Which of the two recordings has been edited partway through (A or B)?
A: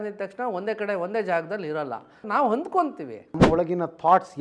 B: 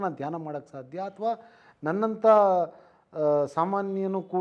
A